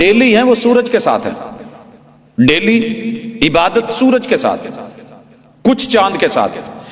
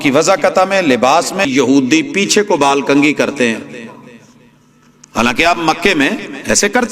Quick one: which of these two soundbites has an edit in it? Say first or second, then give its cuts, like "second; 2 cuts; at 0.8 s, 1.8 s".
second; 1 cut; at 1.5 s